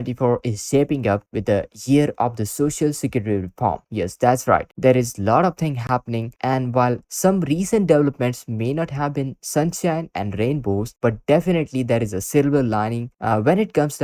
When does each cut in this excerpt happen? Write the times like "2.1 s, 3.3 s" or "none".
none